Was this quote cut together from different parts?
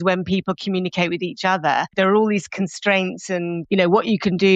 yes; 2 cuts; at 1.9 s, 3.6 s

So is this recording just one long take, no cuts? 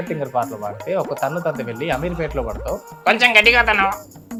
yes; 0 cuts

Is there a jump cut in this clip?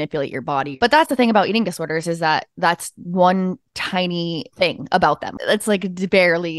yes; 1 cut; at 4.5 s

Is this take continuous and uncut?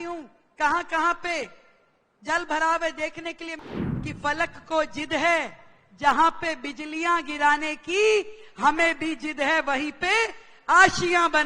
no; 1 cut; at 3.5 s

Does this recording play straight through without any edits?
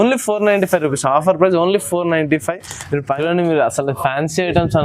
no; 1 cut; at 3.0 s

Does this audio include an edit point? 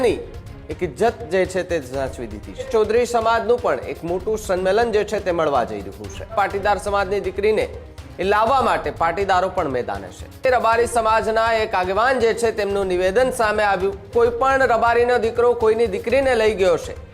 yes; 4 cuts; at 2.7 s, 6.3 s, 10.5 s, 14.1 s

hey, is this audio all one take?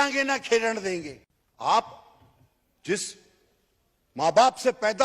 no; 1 cut; at 1.1 s

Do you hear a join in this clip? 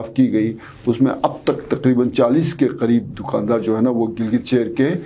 no; 0 cuts

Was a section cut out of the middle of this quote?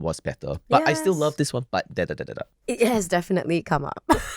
yes; 1 cut; at 2.5 s

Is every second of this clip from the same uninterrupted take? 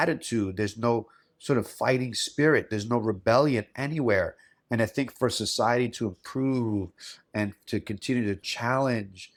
yes; 0 cuts

